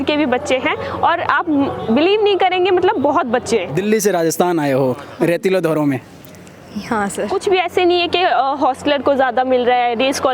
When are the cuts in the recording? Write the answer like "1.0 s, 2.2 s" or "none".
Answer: 3.7 s, 7.3 s